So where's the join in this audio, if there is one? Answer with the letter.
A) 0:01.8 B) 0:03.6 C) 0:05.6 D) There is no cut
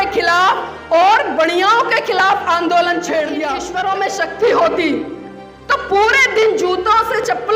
B